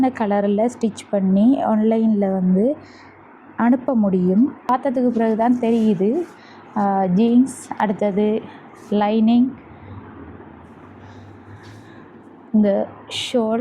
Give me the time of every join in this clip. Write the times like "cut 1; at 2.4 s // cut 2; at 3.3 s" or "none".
cut 1; at 4.7 s